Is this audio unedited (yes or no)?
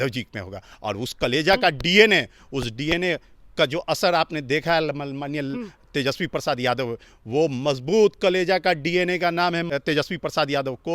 no